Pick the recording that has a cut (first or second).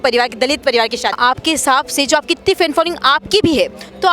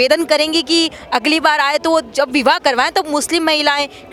first